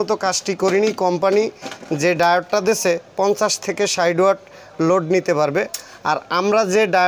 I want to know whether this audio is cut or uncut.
uncut